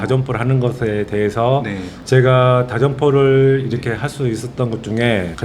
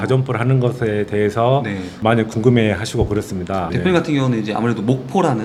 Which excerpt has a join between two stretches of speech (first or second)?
first